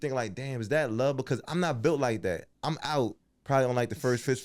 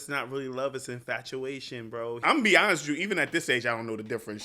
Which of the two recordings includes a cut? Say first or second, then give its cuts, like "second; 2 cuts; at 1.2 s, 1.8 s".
second; 1 cut; at 2.2 s